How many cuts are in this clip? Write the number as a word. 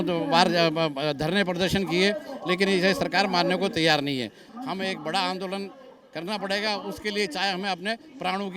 one